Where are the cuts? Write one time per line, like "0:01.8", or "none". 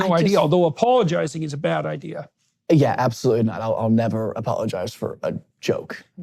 none